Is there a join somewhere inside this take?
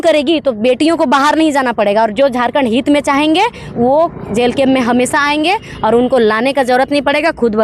no; 0 cuts

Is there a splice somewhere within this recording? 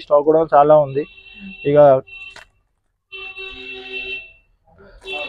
no; 0 cuts

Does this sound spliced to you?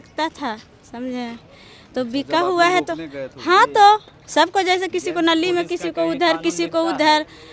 no; 0 cuts

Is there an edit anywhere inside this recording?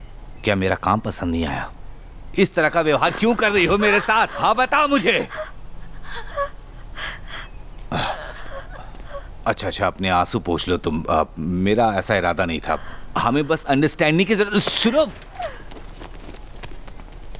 yes; 1 cut; at 13.0 s

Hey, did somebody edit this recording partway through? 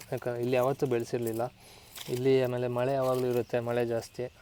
no; 0 cuts

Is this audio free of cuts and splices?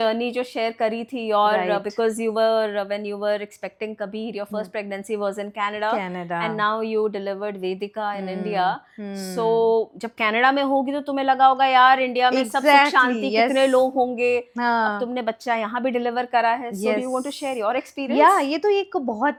yes; 0 cuts

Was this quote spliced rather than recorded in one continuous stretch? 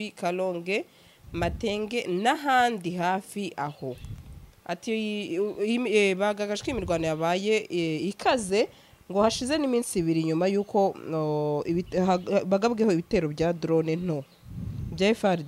no; 0 cuts

